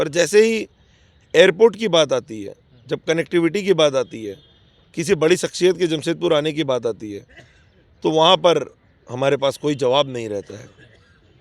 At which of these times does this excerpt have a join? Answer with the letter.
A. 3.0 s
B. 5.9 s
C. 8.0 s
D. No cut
D